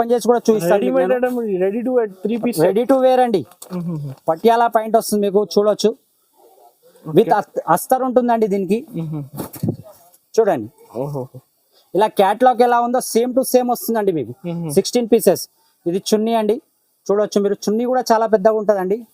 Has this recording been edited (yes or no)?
no